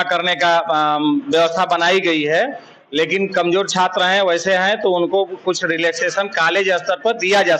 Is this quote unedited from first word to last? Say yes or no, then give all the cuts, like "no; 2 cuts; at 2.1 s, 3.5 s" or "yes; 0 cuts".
yes; 0 cuts